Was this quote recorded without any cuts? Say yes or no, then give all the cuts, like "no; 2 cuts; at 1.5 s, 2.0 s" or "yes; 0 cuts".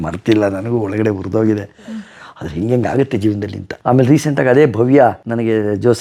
yes; 0 cuts